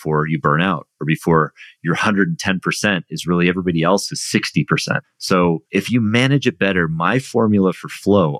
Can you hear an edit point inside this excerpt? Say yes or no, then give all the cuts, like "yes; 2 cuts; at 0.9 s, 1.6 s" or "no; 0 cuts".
yes; 2 cuts; at 5.1 s, 5.6 s